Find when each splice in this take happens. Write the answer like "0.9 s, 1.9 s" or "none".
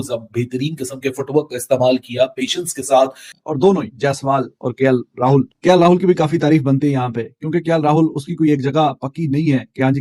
3.3 s